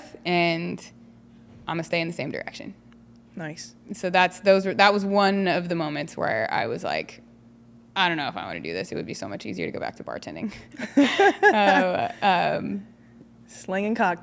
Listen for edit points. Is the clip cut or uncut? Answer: uncut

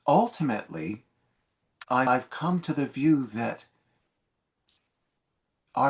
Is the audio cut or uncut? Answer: cut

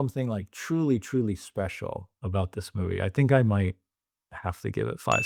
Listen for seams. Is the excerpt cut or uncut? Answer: cut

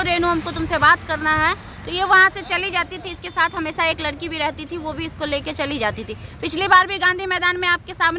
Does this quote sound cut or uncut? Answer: uncut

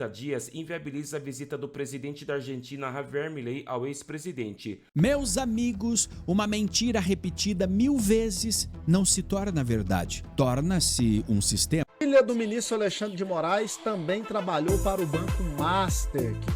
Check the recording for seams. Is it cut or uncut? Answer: cut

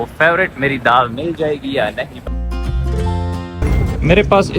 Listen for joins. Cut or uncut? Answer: cut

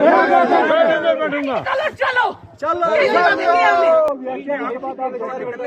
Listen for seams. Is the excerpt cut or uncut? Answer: cut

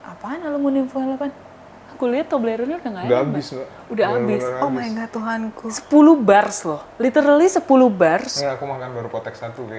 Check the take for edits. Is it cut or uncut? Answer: uncut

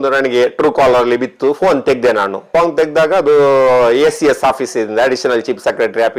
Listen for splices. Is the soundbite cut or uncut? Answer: uncut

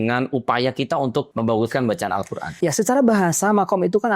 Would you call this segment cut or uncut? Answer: cut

